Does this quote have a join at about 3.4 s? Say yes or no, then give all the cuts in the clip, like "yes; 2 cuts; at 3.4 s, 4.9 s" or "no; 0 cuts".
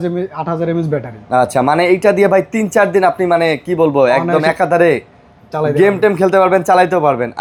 no; 0 cuts